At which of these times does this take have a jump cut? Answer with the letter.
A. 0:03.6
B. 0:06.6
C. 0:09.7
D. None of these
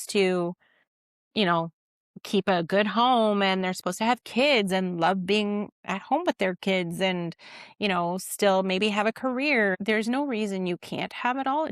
C